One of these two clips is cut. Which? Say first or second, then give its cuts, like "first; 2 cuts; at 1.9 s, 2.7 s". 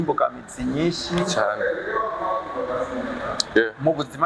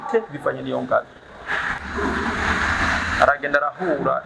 second; 1 cut; at 1.7 s